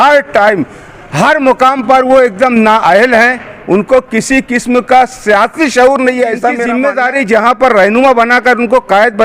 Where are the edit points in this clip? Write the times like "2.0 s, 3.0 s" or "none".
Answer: 6.7 s